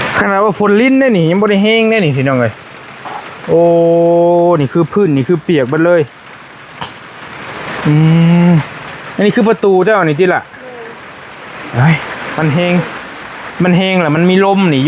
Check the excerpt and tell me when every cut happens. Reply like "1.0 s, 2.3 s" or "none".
12.2 s